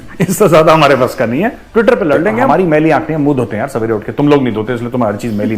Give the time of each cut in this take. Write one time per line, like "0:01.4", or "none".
0:02.4